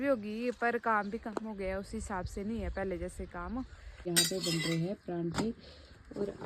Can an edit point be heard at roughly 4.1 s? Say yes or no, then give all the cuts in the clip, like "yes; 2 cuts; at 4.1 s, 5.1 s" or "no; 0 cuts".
yes; 1 cut; at 4.1 s